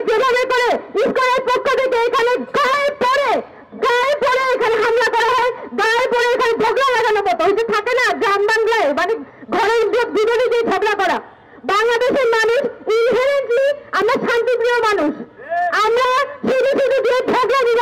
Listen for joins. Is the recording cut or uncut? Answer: uncut